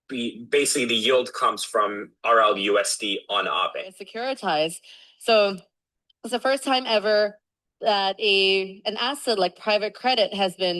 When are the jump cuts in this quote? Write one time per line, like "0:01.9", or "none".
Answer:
0:04.1